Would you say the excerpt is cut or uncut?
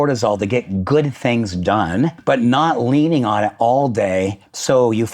cut